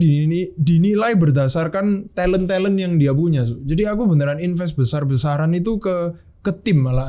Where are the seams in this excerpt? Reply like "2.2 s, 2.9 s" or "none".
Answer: none